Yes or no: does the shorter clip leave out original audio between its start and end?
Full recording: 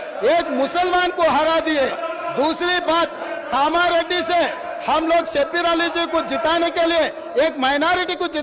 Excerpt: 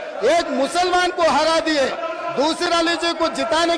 yes